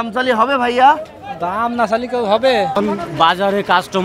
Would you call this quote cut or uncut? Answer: cut